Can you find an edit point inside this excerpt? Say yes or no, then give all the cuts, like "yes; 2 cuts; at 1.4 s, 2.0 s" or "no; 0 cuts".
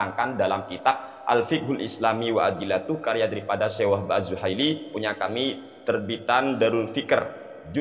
no; 0 cuts